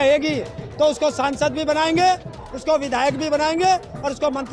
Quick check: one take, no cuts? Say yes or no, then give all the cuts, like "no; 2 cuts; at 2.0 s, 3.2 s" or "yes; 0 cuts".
yes; 0 cuts